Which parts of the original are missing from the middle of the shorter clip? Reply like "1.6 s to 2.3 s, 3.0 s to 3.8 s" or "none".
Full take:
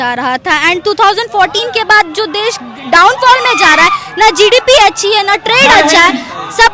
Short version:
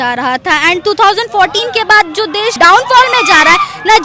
2.5 s to 2.9 s